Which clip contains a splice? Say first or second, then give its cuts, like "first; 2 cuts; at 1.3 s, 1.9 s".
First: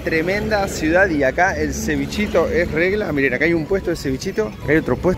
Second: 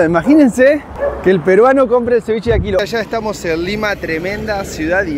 second; 1 cut; at 2.9 s